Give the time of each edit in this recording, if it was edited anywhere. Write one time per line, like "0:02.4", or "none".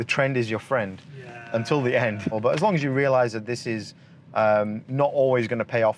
0:02.4